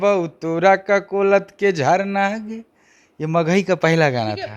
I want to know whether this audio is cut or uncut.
uncut